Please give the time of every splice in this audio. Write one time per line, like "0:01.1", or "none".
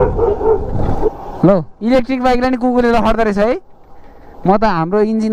0:01.1